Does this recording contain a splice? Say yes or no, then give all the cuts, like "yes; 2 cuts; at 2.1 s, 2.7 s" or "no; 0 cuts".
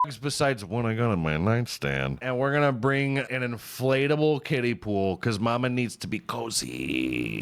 yes; 2 cuts; at 2.2 s, 3.3 s